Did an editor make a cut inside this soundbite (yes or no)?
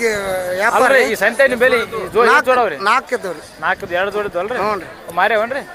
no